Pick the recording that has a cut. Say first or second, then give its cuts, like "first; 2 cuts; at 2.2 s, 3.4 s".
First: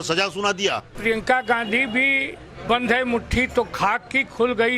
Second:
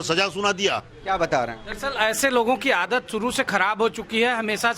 first; 1 cut; at 0.9 s